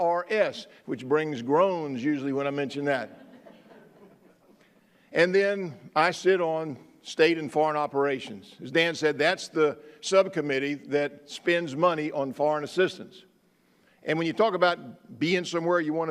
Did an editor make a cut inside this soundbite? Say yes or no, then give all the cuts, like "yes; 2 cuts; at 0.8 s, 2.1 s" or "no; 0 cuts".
yes; 1 cut; at 11.0 s